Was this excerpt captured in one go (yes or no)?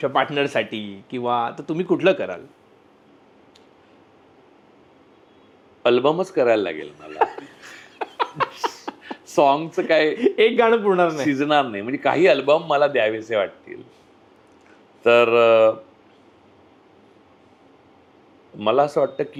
yes